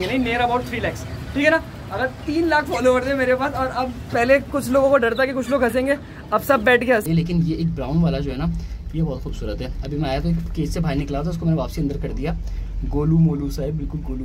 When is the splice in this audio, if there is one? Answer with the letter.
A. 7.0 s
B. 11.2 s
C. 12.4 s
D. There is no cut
A